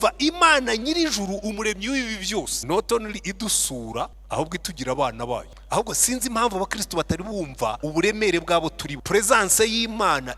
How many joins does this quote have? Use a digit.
5